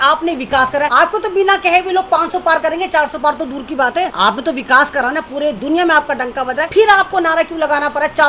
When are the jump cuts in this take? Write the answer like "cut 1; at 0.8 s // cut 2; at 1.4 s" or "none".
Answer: cut 1; at 0.9 s // cut 2; at 4.1 s // cut 3; at 6.6 s

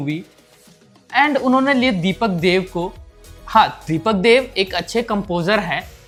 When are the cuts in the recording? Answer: none

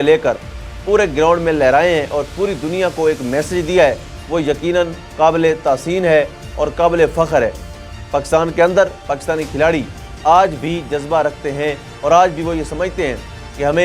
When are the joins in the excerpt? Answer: none

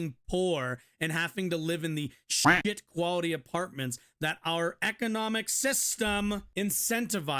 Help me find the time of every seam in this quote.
cut 1; at 6.5 s

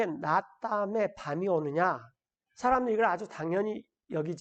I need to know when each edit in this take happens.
none

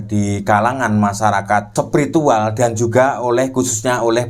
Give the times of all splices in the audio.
cut 1; at 1.7 s

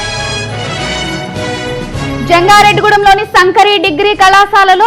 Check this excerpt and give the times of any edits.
none

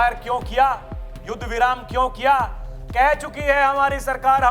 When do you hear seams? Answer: none

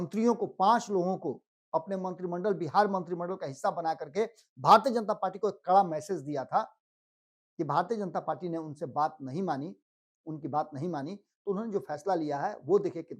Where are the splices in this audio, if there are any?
none

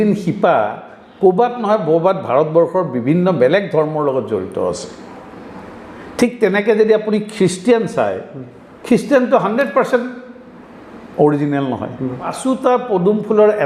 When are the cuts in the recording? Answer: cut 1; at 12.4 s

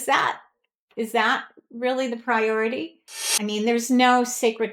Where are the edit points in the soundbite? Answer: cut 1; at 3.4 s

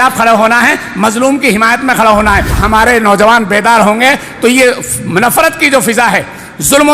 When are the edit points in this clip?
cut 1; at 2.6 s

